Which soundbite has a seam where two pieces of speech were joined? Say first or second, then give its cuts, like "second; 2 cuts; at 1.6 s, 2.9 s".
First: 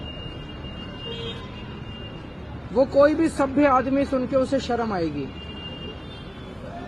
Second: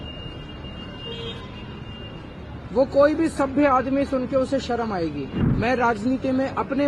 second; 1 cut; at 5.4 s